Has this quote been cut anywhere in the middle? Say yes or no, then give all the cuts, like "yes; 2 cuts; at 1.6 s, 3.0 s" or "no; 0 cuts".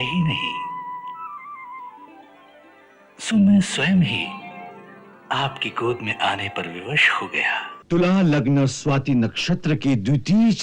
yes; 2 cuts; at 1.2 s, 7.7 s